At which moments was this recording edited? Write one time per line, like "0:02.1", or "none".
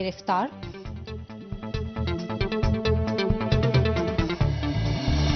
none